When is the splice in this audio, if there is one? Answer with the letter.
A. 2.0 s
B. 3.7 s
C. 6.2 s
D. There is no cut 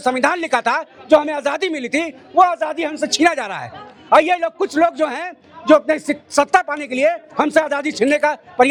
D